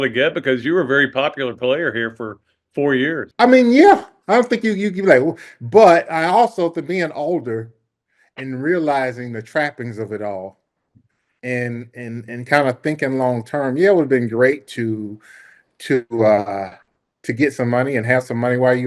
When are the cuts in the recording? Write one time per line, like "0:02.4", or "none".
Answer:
0:03.3